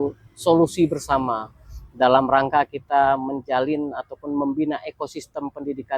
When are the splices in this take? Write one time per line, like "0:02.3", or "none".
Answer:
none